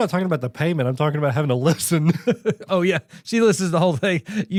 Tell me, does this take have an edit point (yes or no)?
no